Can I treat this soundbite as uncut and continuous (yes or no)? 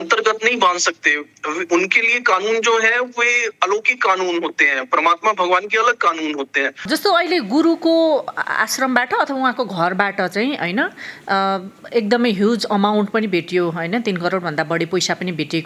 yes